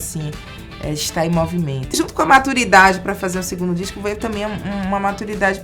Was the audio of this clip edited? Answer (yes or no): yes